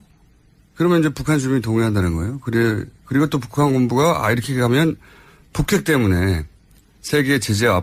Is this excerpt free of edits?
yes; 0 cuts

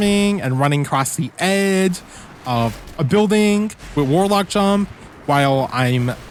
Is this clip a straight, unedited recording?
yes; 0 cuts

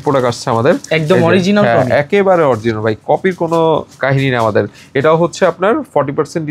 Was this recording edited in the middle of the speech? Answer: no; 0 cuts

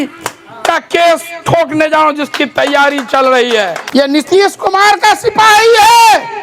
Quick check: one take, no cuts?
no; 1 cut; at 3.8 s

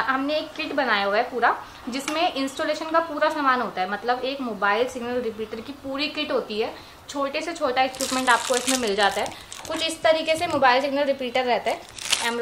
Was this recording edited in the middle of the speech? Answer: no; 0 cuts

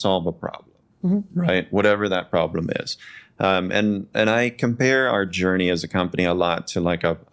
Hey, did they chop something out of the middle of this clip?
no; 0 cuts

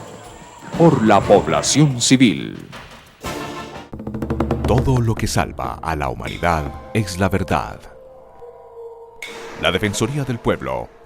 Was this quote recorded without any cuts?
no; 1 cut; at 3.8 s

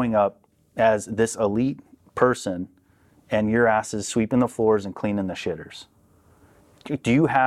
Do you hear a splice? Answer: no; 0 cuts

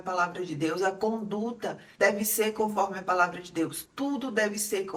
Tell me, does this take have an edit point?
no; 0 cuts

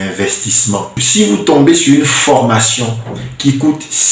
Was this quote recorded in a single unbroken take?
no; 1 cut; at 1.0 s

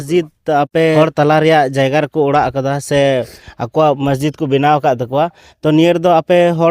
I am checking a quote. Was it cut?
yes; 1 cut; at 1.0 s

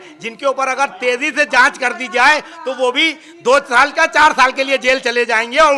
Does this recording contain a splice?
no; 0 cuts

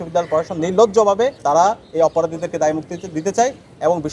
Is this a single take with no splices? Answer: no; 1 cut; at 1.4 s

